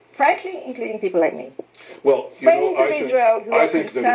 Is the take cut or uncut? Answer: uncut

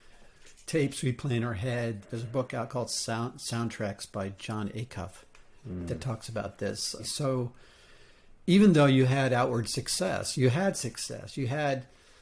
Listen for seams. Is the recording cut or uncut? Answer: cut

